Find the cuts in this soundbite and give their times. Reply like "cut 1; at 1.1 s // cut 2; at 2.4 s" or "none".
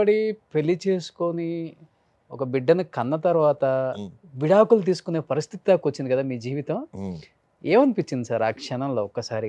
none